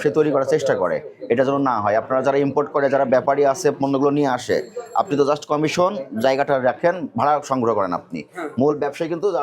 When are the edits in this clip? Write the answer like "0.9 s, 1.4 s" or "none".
none